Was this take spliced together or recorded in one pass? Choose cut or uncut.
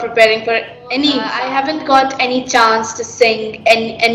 cut